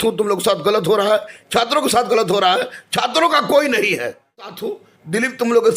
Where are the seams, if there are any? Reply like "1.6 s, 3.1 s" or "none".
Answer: 4.6 s